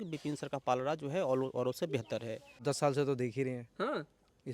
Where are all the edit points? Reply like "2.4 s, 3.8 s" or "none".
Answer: 2.6 s

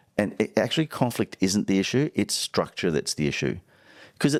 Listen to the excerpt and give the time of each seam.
none

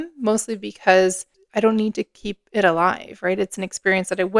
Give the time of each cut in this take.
1.3 s

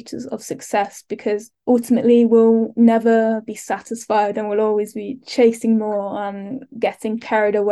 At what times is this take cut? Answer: none

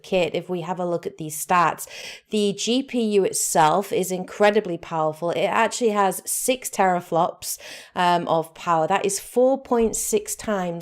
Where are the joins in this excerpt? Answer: 4.2 s

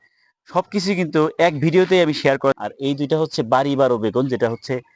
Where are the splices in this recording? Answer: 2.6 s

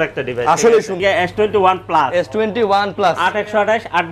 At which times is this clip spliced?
1.0 s

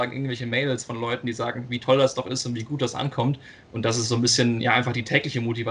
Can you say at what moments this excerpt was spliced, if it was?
none

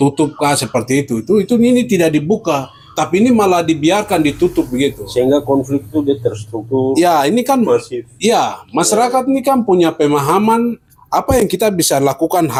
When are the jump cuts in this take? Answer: none

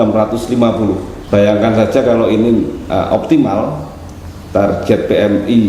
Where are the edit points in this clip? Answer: 1.1 s

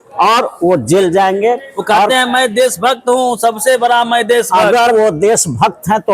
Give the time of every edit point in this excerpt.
none

